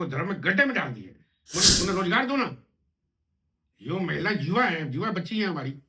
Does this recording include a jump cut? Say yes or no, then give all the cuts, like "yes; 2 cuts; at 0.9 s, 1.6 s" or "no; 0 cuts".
yes; 1 cut; at 1.4 s